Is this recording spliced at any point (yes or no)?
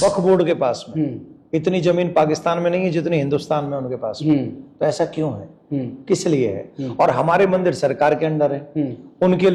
no